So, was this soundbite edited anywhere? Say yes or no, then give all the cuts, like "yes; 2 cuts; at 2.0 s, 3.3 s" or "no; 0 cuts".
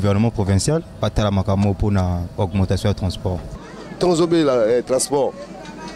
yes; 1 cut; at 3.7 s